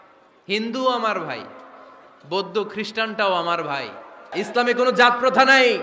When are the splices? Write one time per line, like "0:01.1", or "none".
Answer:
0:04.3